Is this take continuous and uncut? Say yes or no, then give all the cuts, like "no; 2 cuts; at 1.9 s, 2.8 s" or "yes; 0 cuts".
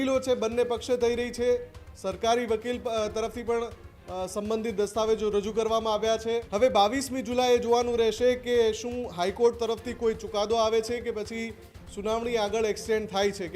no; 1 cut; at 6.5 s